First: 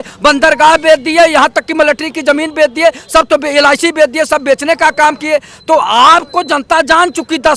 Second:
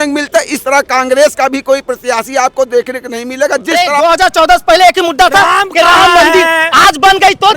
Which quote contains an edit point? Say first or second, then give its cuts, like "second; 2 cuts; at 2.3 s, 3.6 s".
second; 1 cut; at 3.8 s